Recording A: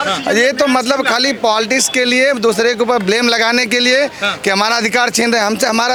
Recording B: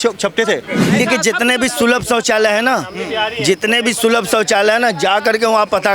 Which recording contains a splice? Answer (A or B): B